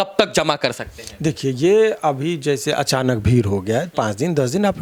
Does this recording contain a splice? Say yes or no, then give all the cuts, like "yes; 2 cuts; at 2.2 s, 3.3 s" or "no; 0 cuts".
no; 0 cuts